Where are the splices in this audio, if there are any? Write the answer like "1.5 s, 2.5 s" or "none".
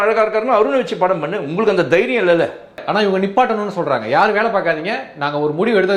2.8 s